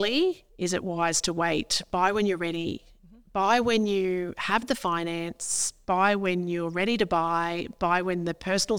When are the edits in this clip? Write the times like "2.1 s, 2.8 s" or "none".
none

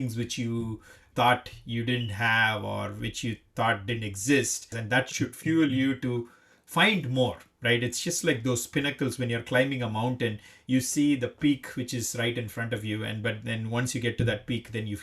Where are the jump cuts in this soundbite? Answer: 1.1 s, 4.8 s

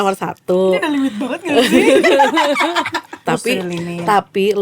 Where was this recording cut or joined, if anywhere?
3.2 s

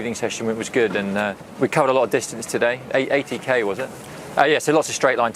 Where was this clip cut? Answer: 1.5 s, 3.9 s

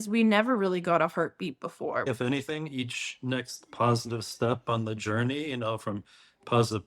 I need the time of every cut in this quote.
2.1 s

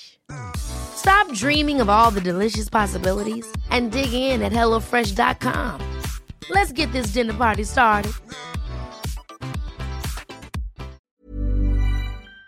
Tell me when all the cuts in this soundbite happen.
11.0 s

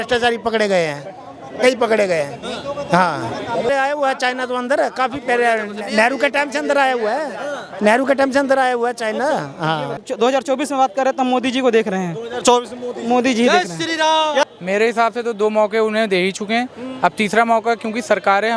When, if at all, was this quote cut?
3.7 s, 10.0 s, 14.4 s

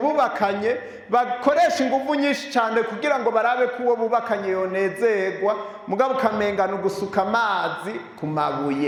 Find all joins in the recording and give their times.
none

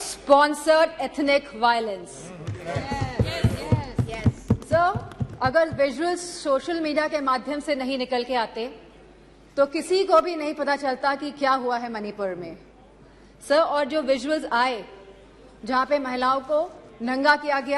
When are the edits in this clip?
none

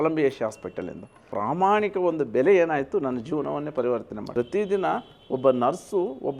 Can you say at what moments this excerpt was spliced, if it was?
1.2 s, 4.2 s

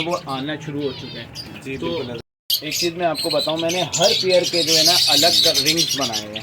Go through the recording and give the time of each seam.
2.2 s

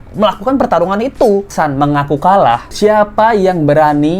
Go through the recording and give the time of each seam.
1.5 s

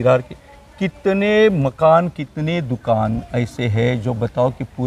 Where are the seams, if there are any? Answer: none

